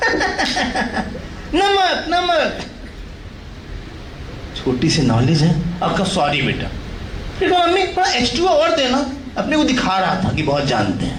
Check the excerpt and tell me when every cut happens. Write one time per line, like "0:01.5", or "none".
none